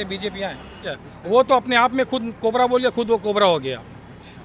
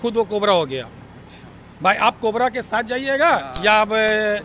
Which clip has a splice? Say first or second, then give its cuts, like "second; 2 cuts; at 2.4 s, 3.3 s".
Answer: first; 1 cut; at 0.9 s